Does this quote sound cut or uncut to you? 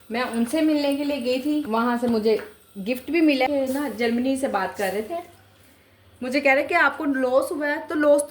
cut